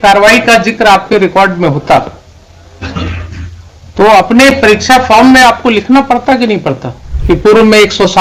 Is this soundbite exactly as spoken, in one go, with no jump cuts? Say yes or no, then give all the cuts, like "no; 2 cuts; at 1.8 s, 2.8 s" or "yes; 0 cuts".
yes; 0 cuts